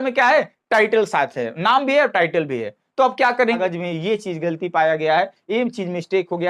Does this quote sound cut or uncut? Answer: cut